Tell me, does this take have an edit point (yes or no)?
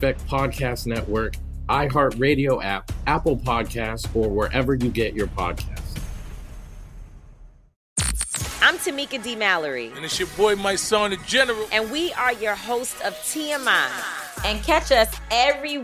yes